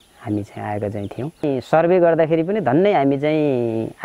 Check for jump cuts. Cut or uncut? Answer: cut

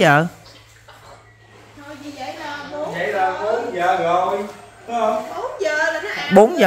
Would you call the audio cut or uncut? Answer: uncut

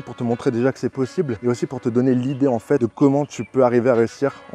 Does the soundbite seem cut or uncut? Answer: cut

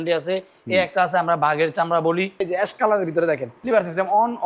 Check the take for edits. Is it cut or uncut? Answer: cut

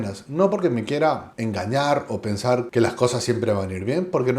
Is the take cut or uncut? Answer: cut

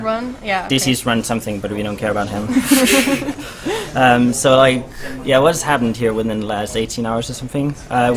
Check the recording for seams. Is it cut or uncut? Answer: cut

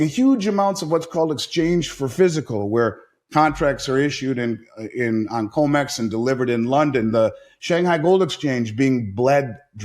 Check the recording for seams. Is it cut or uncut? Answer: uncut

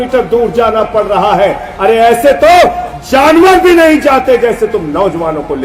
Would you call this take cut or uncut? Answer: uncut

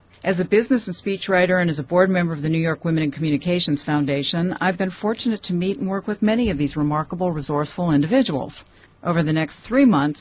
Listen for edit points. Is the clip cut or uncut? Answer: uncut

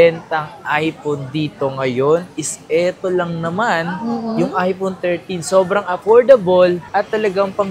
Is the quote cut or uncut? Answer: uncut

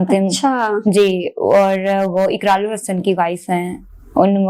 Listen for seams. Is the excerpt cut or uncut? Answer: uncut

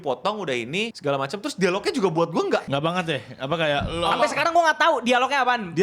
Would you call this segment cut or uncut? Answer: cut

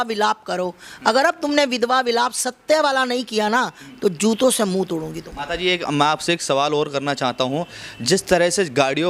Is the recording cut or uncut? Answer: uncut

